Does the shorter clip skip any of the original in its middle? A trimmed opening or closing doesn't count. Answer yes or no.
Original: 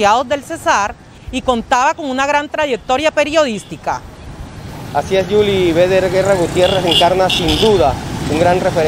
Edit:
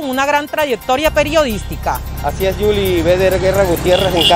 yes